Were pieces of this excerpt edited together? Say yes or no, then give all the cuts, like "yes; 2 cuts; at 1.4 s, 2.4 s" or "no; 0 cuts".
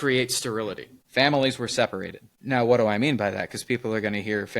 yes; 1 cut; at 0.9 s